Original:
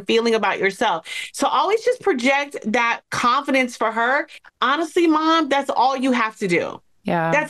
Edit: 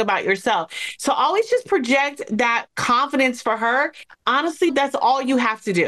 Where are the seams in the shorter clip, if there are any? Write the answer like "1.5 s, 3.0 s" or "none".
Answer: 4.7 s